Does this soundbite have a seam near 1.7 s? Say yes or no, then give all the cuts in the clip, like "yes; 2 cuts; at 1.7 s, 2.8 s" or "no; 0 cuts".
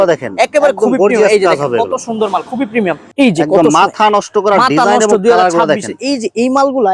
no; 1 cut; at 3.0 s